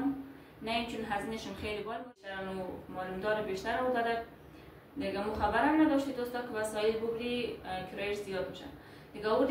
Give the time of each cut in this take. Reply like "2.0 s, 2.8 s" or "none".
2.3 s